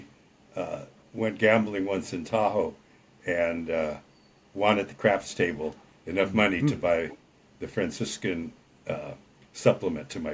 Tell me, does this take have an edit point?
no; 0 cuts

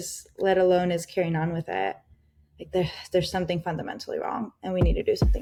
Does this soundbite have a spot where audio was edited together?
no; 0 cuts

